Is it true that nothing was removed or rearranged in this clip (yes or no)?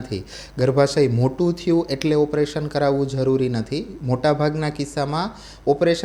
yes